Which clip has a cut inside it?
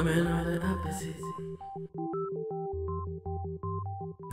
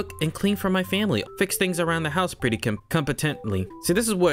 second; 1 cut; at 1.2 s

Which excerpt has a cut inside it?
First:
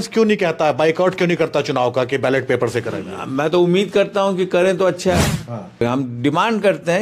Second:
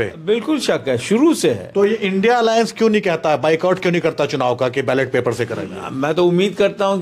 first; 1 cut; at 5.8 s

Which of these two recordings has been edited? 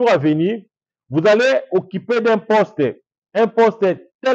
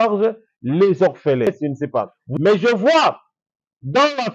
second; 1 cut; at 1.5 s

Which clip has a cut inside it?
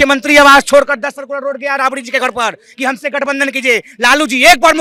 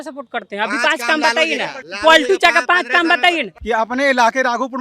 second; 2 cuts; at 1.9 s, 3.5 s

